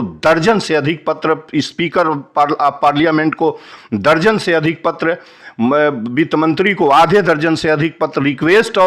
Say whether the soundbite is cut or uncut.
uncut